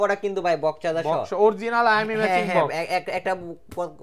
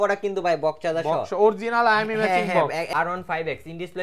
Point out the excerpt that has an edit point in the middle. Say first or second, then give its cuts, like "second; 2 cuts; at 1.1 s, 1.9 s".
second; 1 cut; at 2.9 s